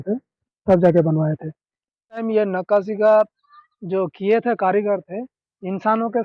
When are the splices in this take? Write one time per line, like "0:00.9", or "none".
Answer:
0:02.2